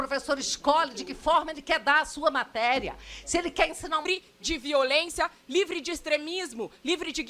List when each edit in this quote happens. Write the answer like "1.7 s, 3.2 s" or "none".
4.0 s